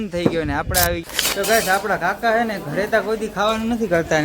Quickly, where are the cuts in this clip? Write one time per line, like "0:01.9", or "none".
0:01.0